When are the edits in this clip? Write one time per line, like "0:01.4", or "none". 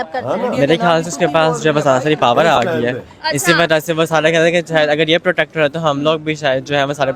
none